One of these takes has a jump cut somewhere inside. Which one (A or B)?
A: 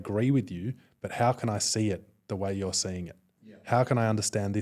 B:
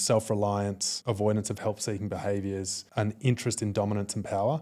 B